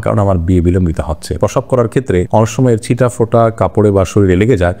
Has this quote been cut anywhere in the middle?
yes; 1 cut; at 1.3 s

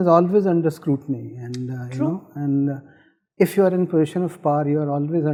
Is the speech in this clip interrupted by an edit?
no; 0 cuts

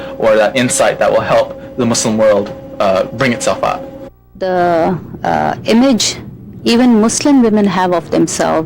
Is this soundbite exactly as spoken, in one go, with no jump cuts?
no; 1 cut; at 4.5 s

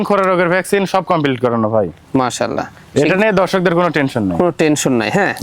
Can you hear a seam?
no; 0 cuts

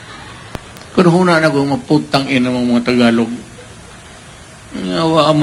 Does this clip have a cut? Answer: no; 0 cuts

